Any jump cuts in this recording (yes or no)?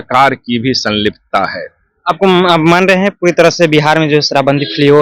no